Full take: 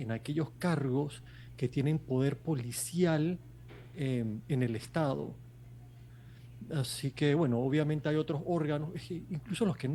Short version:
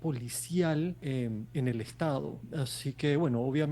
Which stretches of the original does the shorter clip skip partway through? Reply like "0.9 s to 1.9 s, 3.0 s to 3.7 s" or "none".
3.4 s to 3.9 s, 5.4 s to 6.6 s